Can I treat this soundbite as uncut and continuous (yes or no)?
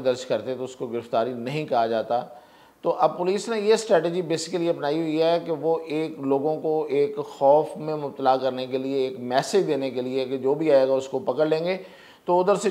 yes